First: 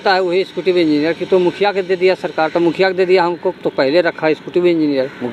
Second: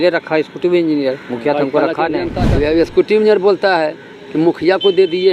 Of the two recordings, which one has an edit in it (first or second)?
second